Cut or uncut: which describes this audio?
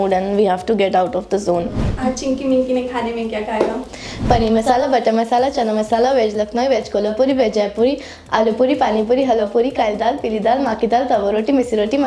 cut